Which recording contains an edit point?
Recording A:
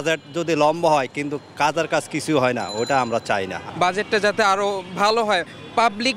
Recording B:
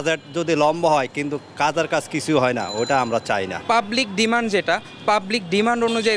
B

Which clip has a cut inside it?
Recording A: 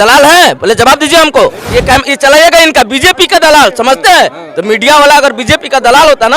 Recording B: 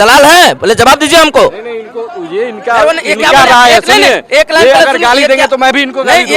A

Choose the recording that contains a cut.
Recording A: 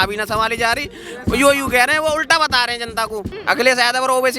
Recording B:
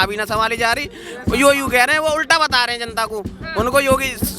A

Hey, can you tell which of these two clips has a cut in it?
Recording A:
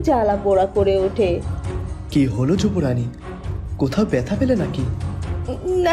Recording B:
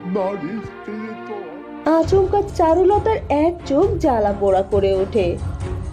B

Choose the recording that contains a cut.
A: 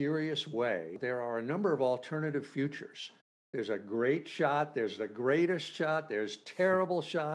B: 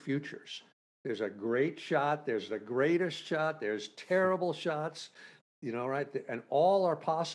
A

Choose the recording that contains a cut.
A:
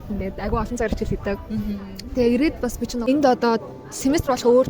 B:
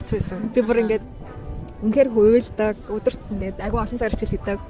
A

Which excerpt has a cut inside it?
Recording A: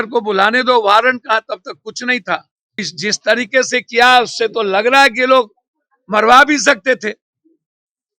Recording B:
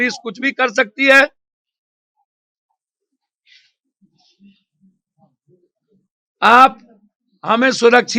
A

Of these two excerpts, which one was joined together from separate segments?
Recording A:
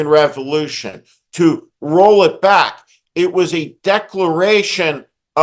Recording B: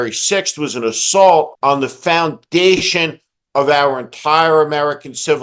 B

